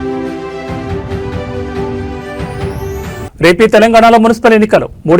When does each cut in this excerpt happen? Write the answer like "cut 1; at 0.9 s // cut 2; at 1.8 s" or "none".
cut 1; at 2.1 s